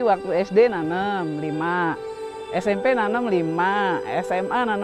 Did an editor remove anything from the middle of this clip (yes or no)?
no